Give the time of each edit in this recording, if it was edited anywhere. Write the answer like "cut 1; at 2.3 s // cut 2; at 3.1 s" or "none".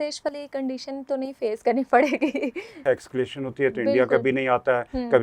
cut 1; at 2.8 s